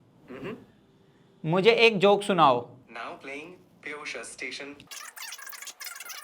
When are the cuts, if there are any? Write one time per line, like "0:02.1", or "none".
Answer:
none